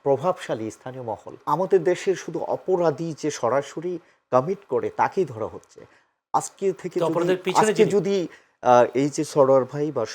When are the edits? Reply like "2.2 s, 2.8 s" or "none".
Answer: 1.4 s